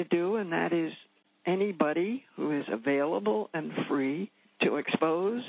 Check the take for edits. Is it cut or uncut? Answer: cut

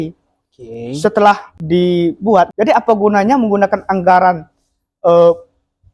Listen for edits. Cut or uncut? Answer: cut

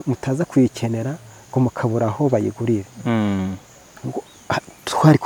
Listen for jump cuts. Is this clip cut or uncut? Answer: uncut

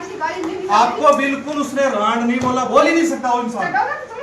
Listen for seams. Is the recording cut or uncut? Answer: uncut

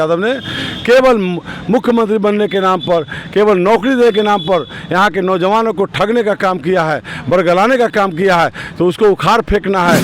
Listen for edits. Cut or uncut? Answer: uncut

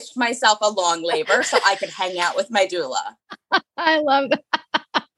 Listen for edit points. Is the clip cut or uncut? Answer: uncut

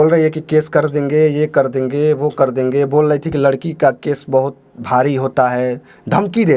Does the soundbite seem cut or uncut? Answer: uncut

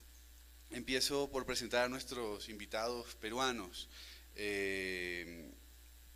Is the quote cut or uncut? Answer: uncut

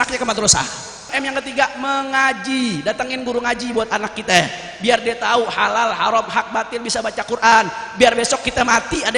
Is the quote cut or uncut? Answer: cut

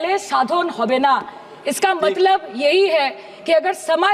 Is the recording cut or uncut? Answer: uncut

